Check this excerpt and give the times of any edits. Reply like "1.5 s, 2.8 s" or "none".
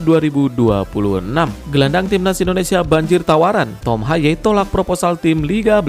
1.6 s